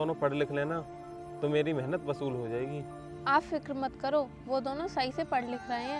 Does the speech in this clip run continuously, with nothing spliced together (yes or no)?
yes